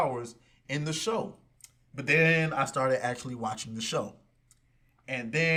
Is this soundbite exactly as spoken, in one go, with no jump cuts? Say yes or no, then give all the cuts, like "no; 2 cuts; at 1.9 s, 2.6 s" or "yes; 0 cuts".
yes; 0 cuts